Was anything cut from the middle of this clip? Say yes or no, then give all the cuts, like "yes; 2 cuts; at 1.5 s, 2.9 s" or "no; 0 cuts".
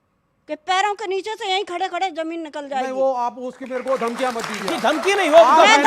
no; 0 cuts